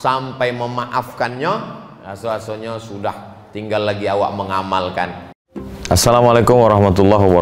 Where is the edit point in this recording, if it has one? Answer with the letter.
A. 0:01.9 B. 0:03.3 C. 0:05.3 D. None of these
C